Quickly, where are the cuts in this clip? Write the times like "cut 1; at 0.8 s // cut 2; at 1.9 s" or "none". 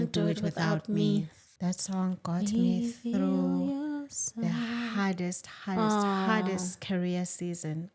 cut 1; at 1.4 s